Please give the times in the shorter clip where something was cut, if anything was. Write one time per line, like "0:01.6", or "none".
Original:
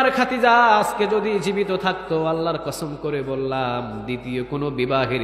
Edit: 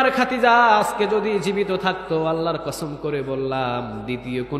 none